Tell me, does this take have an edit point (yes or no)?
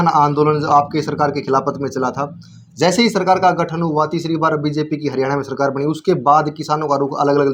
no